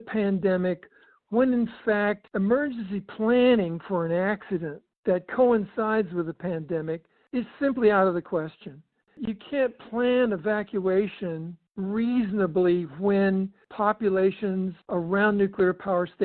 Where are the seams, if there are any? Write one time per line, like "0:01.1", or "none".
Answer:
0:02.2
0:09.1
0:13.6
0:14.8